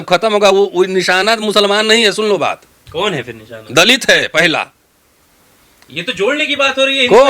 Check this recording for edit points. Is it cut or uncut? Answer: uncut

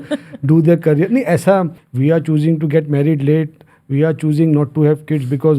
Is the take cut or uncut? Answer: cut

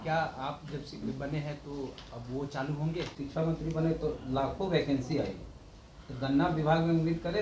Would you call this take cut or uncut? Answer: cut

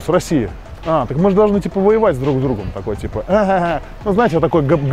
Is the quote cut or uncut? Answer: uncut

